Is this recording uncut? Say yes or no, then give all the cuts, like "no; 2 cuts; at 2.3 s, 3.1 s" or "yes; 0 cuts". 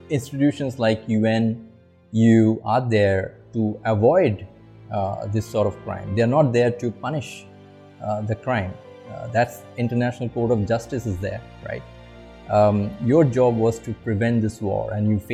yes; 0 cuts